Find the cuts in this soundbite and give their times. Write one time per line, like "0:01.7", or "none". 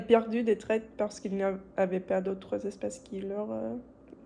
none